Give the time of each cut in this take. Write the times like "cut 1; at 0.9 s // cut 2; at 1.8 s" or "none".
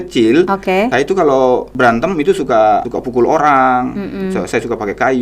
cut 1; at 0.9 s // cut 2; at 1.7 s // cut 3; at 2.9 s